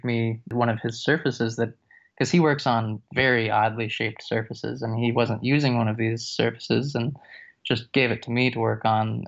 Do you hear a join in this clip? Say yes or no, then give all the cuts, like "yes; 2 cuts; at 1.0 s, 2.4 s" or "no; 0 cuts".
no; 0 cuts